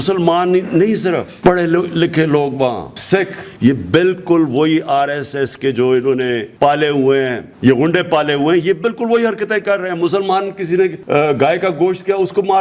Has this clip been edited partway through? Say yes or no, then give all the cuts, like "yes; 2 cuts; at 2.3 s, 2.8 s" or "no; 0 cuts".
yes; 4 cuts; at 3.5 s, 6.5 s, 7.4 s, 11.0 s